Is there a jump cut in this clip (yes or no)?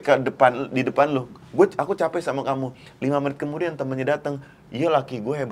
no